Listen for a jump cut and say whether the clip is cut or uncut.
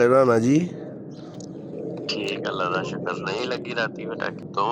uncut